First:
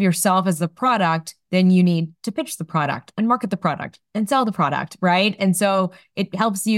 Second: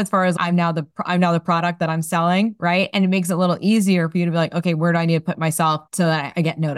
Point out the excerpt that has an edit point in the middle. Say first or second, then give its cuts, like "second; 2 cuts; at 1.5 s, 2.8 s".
second; 1 cut; at 5.9 s